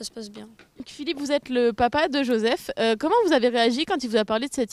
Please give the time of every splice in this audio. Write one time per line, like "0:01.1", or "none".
none